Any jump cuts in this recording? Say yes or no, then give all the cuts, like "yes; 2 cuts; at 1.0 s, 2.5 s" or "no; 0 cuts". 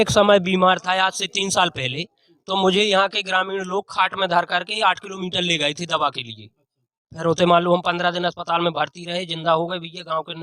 no; 0 cuts